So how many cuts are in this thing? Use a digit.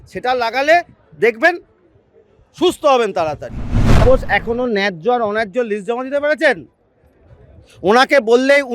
1